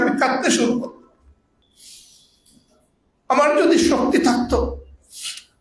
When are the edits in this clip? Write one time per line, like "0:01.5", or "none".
0:01.6